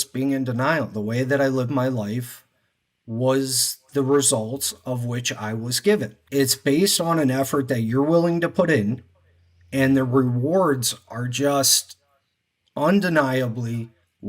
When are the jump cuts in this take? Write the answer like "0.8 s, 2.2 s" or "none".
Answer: 6.2 s